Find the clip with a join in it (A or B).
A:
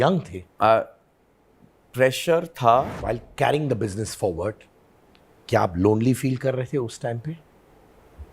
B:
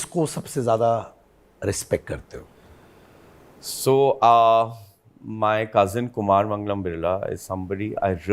A